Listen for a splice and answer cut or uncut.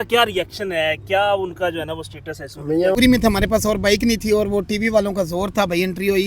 cut